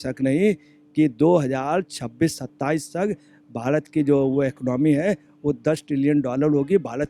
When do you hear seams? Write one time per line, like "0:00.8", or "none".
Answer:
none